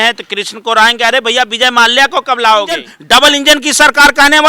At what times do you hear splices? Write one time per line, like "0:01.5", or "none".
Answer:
0:02.9